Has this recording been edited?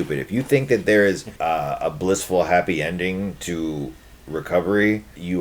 yes; 1 cut; at 1.3 s

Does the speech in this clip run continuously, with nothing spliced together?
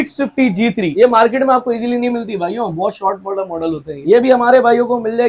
yes; 0 cuts

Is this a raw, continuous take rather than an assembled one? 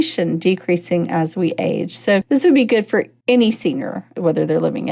no; 2 cuts; at 3.1 s, 4.2 s

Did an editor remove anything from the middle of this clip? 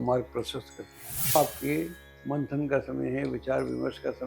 yes; 1 cut; at 1.3 s

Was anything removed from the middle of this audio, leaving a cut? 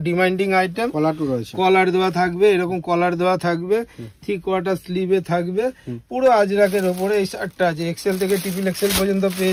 no; 0 cuts

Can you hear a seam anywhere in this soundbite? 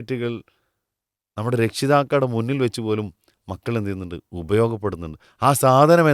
no; 0 cuts

